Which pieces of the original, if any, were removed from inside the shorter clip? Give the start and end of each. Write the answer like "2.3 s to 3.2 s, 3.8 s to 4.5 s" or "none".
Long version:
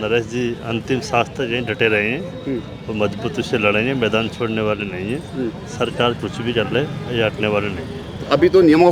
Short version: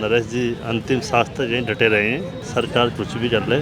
2.4 s to 5.6 s